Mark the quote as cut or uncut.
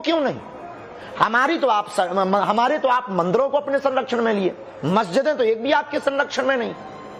cut